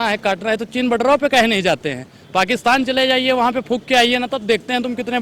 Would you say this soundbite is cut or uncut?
uncut